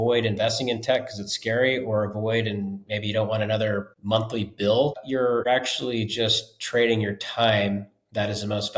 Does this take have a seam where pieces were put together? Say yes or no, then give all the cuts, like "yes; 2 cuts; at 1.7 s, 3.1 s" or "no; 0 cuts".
yes; 2 cuts; at 3.9 s, 5.4 s